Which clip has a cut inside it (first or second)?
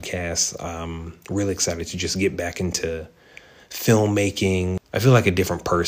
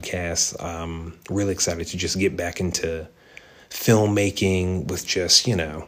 first